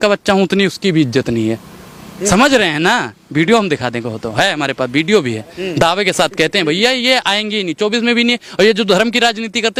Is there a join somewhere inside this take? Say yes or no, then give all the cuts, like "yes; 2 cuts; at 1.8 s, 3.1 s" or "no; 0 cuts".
no; 0 cuts